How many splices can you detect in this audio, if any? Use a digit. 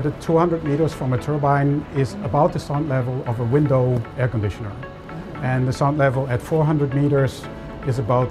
0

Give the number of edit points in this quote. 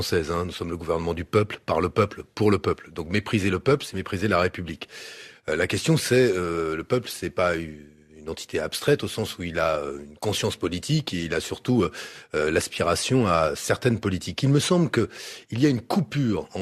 1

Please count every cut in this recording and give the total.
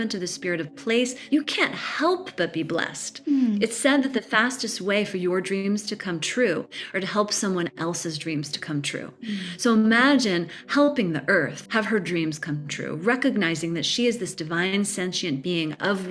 2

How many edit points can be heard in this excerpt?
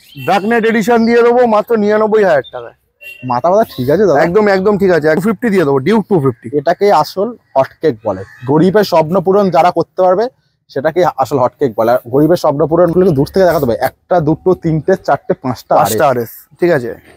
2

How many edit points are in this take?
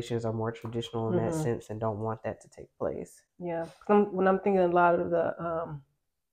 0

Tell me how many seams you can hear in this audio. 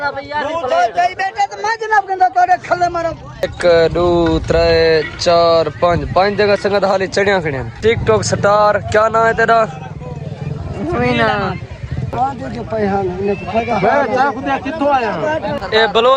3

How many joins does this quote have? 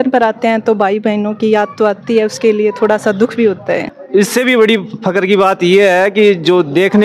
1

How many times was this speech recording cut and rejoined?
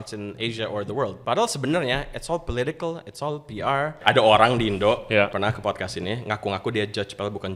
3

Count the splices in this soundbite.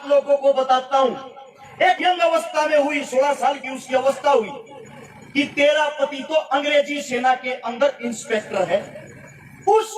1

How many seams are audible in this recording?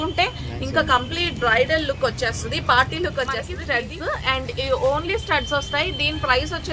1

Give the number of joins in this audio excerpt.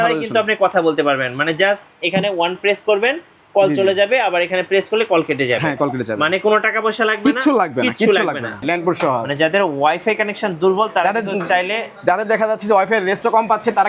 1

